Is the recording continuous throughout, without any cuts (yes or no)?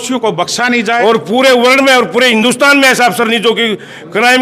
no